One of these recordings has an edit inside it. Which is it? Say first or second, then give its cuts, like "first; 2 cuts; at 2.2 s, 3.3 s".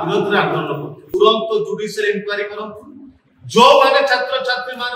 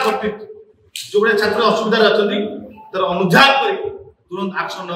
first; 1 cut; at 1.0 s